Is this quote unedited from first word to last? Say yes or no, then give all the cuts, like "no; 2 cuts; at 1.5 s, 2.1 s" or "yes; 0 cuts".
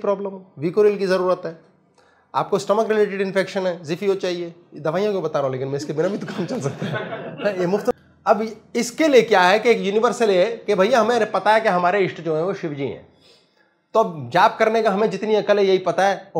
yes; 0 cuts